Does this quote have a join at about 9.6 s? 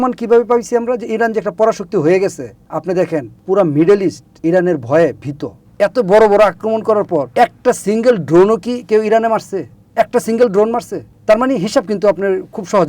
no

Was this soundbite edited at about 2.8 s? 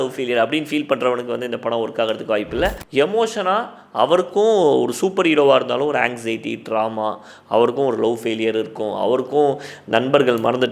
yes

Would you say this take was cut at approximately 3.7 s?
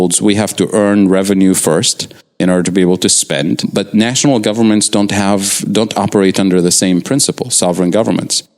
yes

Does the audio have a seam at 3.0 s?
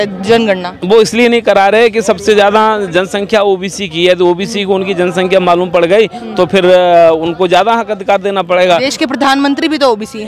no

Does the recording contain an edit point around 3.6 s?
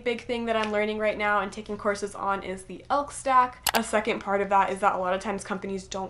yes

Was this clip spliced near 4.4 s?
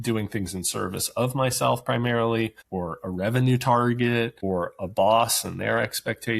yes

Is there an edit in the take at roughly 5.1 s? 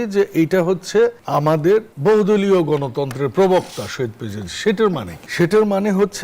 yes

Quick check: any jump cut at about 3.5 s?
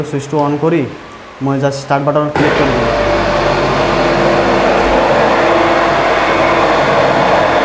no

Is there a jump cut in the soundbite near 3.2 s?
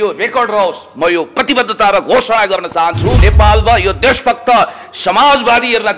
yes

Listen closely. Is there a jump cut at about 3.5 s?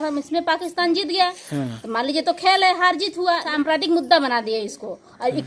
yes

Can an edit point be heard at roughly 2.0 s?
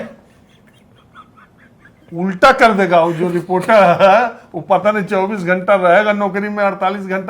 yes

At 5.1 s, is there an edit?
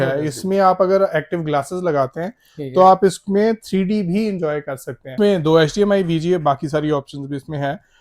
yes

